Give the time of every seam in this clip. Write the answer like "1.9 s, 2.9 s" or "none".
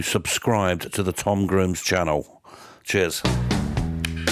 none